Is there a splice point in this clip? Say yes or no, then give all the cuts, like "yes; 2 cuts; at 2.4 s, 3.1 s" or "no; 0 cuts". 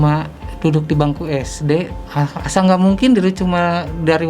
yes; 1 cut; at 2.0 s